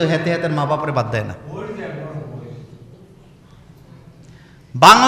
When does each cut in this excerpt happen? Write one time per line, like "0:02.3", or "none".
none